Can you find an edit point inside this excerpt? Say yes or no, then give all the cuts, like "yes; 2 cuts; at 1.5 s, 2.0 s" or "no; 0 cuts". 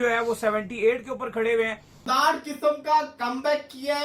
yes; 1 cut; at 2.0 s